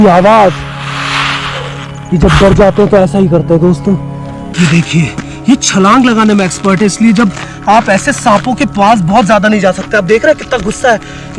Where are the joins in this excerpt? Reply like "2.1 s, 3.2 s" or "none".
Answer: 4.5 s